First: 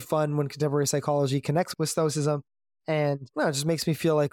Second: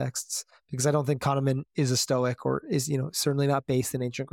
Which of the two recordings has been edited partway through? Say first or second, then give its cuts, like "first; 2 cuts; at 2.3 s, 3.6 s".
first; 1 cut; at 1.7 s